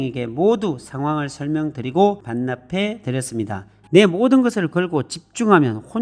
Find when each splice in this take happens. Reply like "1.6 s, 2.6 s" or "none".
3.8 s